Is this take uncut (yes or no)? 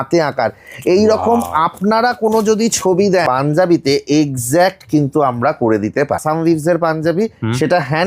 no